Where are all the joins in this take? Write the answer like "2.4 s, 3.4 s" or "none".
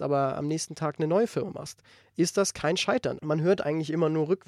3.2 s

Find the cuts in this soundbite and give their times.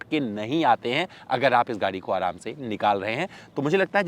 none

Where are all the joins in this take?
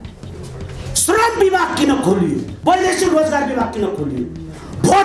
2.5 s

